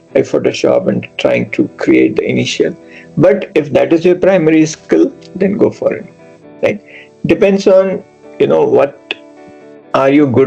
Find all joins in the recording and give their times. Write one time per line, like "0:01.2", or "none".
none